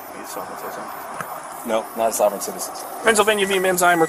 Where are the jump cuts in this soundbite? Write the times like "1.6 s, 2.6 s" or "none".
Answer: 3.0 s